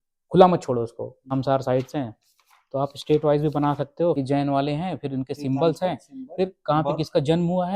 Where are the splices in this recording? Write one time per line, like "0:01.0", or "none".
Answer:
0:01.3
0:04.2